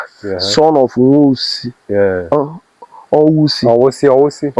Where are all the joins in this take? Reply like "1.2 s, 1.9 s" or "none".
none